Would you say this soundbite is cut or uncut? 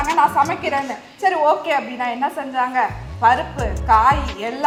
uncut